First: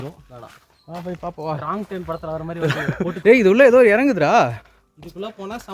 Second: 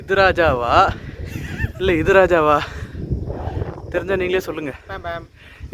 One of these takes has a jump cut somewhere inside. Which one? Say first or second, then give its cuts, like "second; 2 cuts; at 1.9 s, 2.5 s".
first; 1 cut; at 3.1 s